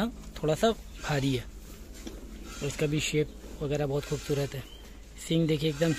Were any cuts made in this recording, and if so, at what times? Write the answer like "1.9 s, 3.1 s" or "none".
none